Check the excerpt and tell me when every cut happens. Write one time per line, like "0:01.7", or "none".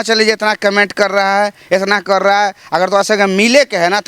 none

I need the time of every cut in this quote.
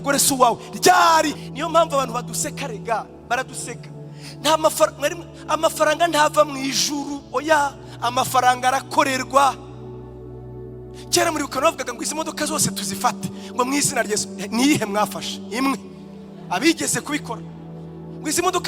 0:01.4

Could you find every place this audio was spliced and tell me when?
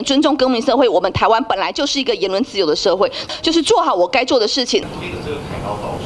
0:03.2
0:04.9

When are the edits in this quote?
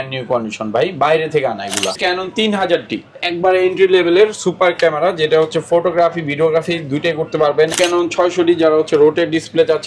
0:01.9
0:07.7

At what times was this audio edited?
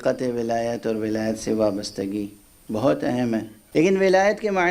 0:03.6

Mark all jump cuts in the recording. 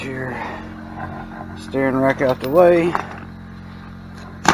none

